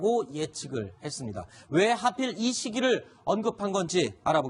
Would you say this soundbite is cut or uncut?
cut